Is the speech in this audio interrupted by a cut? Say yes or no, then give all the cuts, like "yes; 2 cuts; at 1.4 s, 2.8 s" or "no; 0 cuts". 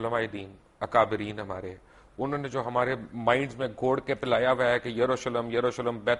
no; 0 cuts